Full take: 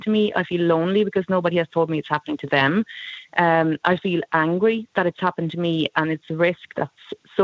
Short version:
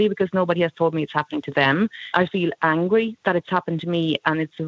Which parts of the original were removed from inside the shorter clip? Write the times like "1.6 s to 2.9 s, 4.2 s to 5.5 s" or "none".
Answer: 3.0 s to 3.8 s